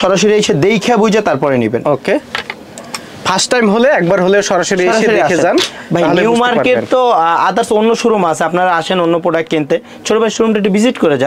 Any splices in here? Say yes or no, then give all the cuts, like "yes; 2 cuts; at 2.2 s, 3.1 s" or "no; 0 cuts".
no; 0 cuts